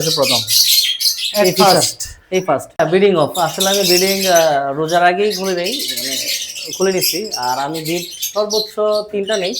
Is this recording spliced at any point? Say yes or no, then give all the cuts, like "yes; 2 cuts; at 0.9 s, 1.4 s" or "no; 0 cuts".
yes; 1 cut; at 2.8 s